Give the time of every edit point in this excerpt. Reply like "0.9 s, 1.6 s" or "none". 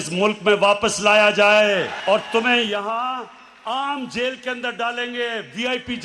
none